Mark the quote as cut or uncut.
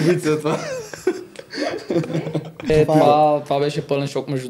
cut